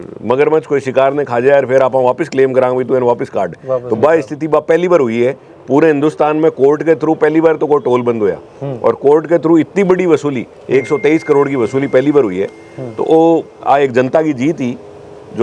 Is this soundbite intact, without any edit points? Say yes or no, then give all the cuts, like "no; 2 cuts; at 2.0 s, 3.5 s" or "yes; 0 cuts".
yes; 0 cuts